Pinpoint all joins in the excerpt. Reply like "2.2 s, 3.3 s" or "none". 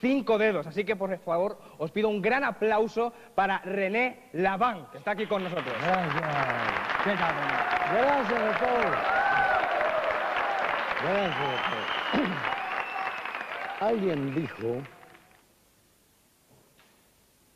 8.1 s